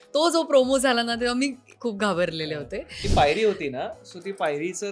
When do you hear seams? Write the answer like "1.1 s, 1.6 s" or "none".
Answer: 3.0 s